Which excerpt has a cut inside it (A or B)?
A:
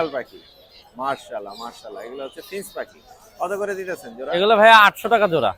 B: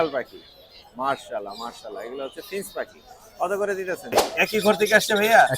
B